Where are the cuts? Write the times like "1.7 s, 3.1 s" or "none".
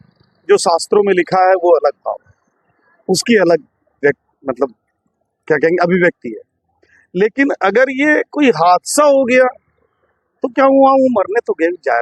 none